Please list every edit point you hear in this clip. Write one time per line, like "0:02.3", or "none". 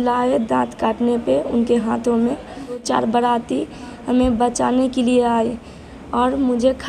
0:02.8